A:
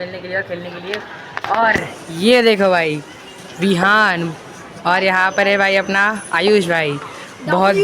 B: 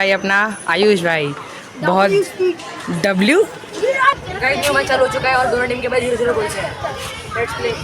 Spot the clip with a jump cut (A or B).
B